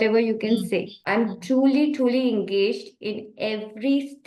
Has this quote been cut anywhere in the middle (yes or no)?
yes